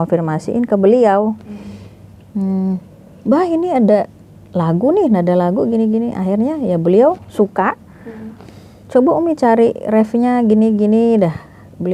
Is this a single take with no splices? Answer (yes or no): yes